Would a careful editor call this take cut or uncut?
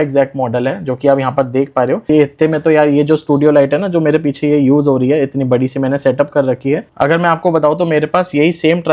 cut